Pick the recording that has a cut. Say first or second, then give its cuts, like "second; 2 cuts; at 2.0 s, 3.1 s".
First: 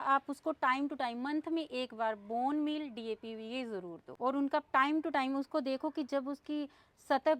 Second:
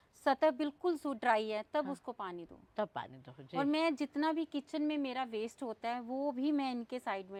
first; 1 cut; at 4.0 s